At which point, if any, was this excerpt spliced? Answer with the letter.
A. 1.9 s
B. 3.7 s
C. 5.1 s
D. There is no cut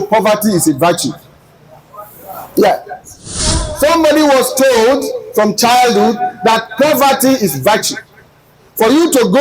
B